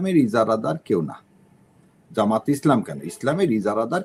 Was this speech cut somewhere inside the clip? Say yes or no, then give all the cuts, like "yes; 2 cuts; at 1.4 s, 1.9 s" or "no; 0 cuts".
no; 0 cuts